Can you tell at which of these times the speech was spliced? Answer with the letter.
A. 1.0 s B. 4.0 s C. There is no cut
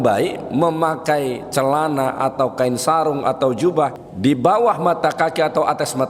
B